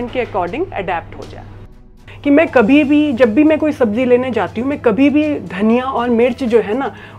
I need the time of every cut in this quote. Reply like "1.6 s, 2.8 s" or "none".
1.8 s

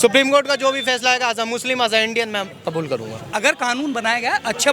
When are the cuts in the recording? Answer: 3.2 s

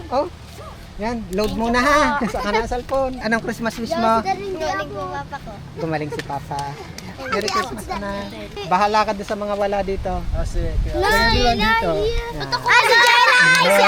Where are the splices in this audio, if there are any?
3.2 s, 8.6 s

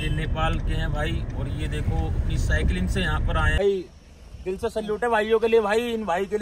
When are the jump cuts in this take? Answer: 3.6 s

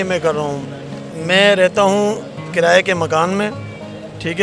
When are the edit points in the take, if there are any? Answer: none

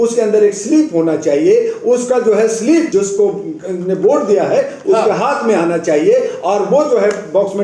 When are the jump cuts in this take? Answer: 2.9 s

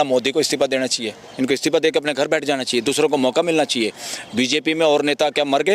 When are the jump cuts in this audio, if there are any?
1.3 s

